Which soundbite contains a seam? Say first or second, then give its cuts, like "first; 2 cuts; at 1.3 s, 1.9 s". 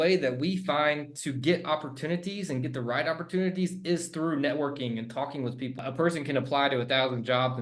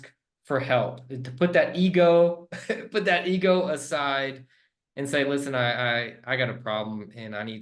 first; 1 cut; at 5.8 s